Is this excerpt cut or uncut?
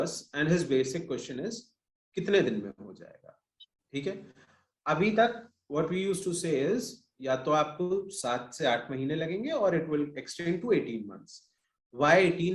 uncut